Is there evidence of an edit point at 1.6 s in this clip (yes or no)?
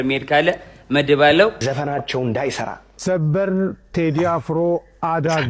yes